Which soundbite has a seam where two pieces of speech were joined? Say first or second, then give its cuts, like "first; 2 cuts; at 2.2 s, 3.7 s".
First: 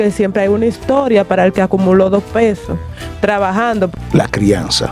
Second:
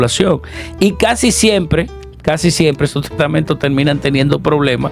first; 1 cut; at 3.9 s